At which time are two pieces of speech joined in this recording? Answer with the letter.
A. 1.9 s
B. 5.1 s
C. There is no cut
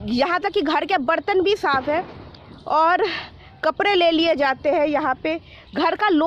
C